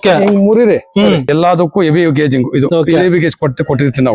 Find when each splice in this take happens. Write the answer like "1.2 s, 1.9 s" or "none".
1.3 s